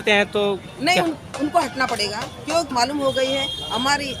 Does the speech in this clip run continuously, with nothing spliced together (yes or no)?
no